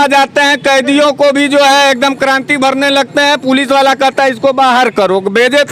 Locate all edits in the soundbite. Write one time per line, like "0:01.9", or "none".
none